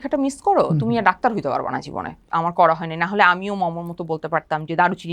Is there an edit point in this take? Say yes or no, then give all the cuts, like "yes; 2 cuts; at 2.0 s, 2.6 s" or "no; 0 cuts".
yes; 1 cut; at 2.1 s